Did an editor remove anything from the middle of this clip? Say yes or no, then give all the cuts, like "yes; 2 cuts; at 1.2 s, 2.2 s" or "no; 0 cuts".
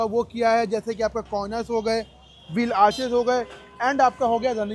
no; 0 cuts